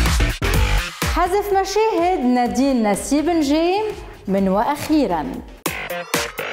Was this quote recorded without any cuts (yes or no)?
no